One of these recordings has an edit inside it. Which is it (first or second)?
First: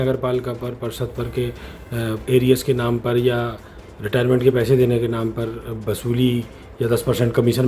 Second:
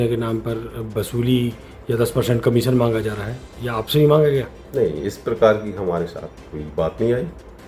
first